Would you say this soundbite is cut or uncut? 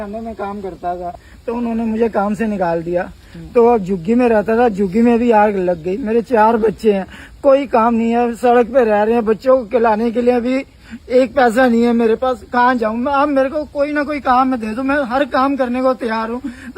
cut